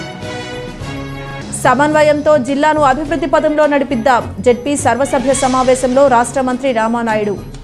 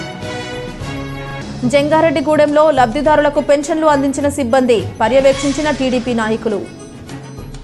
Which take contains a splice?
second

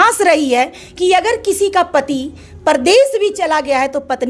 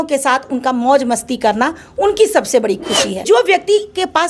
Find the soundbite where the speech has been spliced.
second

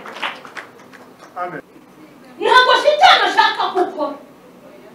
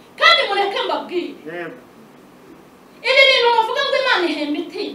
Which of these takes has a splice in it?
first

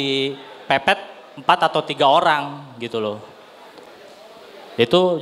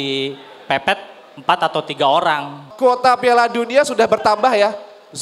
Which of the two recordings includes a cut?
second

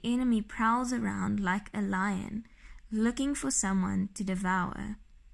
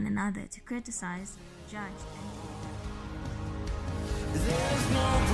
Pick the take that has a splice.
second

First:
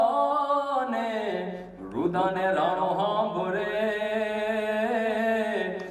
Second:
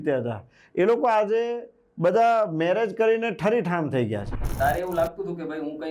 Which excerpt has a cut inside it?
second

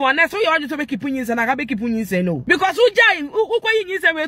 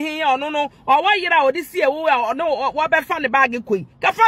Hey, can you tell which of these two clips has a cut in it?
first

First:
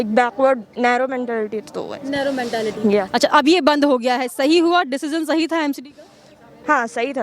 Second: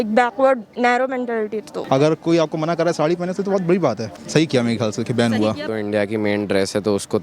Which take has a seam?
second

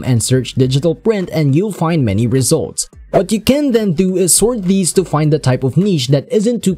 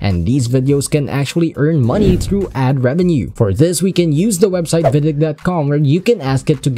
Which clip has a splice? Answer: second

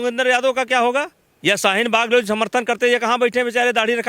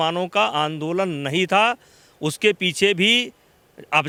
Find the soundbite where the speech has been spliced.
first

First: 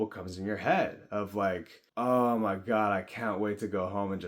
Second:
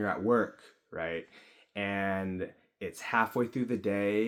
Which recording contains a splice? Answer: first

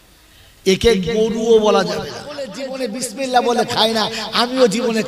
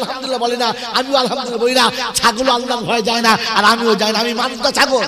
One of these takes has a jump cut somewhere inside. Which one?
first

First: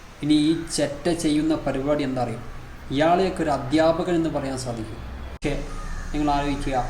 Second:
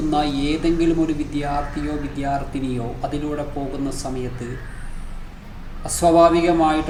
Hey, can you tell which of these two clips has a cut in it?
first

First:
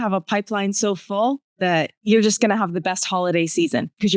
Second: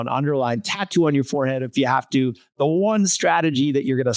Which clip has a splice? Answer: first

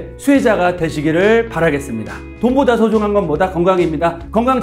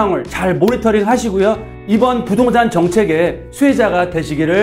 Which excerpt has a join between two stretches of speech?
first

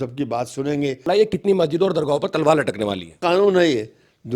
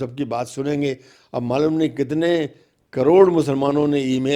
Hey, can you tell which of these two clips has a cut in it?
first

